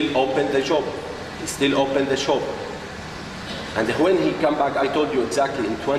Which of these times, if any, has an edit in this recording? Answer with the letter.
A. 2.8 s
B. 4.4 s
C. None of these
A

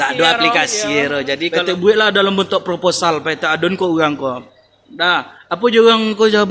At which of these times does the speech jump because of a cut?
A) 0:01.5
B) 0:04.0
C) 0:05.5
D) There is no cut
A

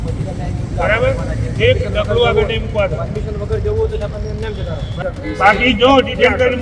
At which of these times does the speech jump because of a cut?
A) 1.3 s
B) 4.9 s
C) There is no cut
B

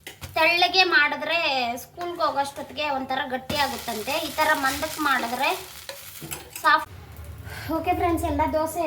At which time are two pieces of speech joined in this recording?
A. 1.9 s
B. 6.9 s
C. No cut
B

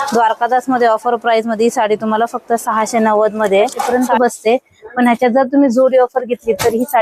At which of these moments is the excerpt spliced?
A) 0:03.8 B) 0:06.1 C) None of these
A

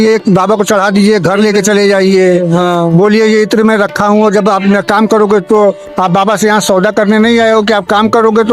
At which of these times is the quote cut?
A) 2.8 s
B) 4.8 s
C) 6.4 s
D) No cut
D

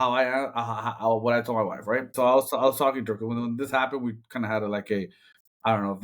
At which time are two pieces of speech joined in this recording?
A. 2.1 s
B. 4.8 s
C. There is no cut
A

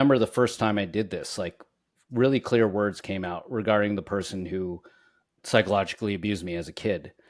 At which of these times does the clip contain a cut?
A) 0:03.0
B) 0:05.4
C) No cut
B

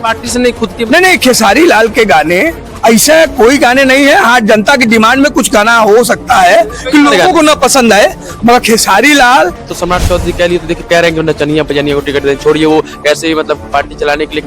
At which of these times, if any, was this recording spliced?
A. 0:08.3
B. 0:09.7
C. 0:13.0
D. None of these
B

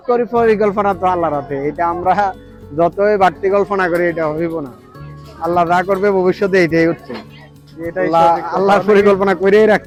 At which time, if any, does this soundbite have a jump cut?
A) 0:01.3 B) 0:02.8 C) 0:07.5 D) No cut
D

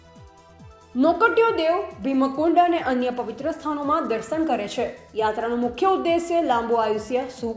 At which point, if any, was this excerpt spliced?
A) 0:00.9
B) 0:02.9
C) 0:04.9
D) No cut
A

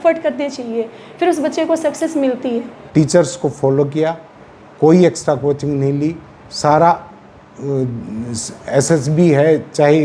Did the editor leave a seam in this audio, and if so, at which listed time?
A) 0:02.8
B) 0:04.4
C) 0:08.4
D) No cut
A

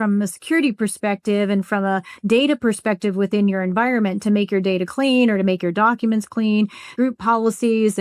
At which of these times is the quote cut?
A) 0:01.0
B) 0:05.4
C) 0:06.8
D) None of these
C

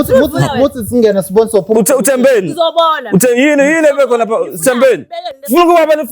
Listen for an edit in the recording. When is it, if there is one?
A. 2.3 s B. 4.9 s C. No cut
C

